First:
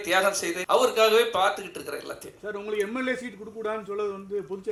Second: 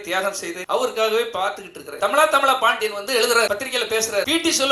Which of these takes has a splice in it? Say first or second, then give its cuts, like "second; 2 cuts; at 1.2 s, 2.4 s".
second; 1 cut; at 2.0 s